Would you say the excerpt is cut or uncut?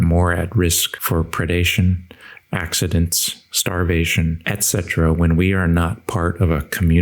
cut